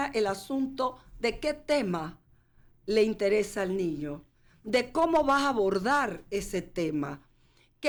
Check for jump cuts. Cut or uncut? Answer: uncut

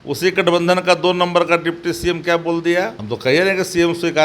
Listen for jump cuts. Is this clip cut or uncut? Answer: cut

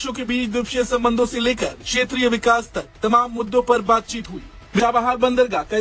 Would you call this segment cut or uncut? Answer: cut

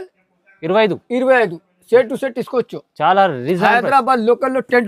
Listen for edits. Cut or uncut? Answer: uncut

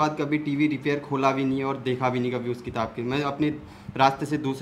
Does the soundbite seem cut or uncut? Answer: uncut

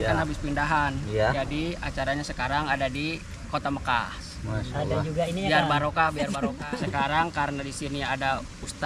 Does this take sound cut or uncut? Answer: cut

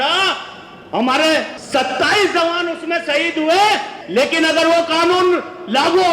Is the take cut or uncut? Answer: cut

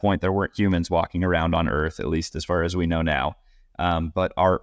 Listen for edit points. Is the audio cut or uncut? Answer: uncut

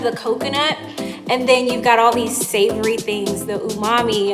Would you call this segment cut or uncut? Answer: cut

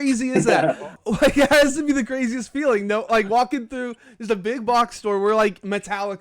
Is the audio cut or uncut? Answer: cut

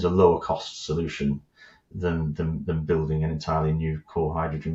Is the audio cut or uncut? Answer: uncut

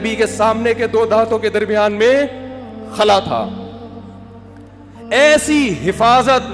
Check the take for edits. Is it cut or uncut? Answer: cut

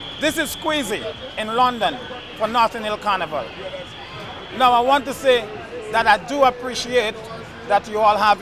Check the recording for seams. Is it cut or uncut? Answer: uncut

